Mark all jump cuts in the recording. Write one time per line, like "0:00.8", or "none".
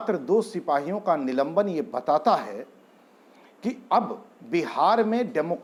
none